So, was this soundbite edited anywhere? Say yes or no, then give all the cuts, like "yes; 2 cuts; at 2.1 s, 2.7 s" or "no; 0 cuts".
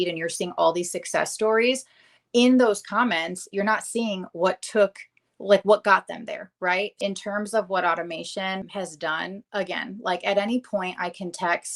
yes; 2 cuts; at 7.0 s, 8.7 s